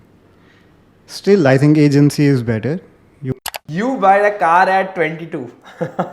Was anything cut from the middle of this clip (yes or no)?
yes